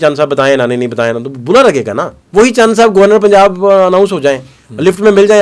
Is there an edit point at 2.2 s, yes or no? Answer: yes